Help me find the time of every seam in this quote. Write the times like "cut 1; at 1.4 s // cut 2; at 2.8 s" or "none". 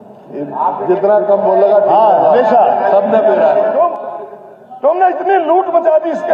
cut 1; at 3.7 s

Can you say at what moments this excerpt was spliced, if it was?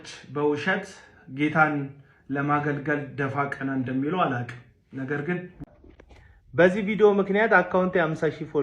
cut 1; at 5.6 s

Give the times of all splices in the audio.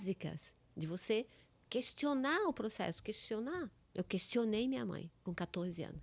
cut 1; at 3.8 s // cut 2; at 5.1 s

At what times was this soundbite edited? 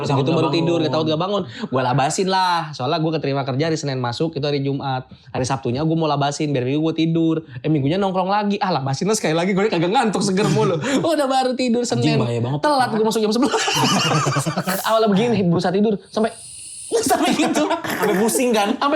cut 1; at 14.8 s // cut 2; at 17.9 s

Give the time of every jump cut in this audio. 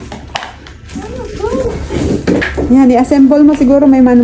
cut 1; at 2.5 s

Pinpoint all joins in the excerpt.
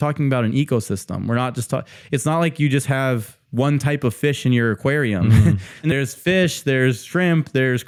none

